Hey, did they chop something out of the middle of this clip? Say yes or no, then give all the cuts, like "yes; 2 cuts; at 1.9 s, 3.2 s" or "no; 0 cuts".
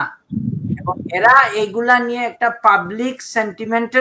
no; 0 cuts